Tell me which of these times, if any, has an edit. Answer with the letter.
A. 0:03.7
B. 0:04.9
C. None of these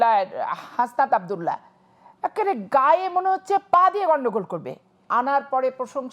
B